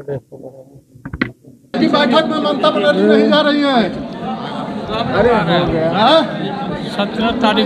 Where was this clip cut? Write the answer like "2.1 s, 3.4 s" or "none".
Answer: 1.8 s